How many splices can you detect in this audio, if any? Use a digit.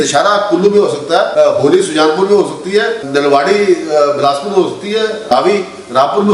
3